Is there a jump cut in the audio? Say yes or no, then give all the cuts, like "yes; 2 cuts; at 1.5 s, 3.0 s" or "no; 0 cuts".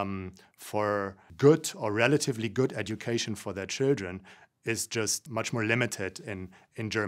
yes; 1 cut; at 5.2 s